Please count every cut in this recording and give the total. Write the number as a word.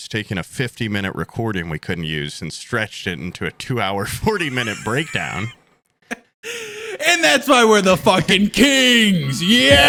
zero